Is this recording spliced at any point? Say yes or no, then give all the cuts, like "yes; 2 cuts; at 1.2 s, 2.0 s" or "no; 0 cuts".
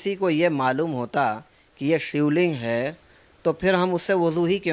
no; 0 cuts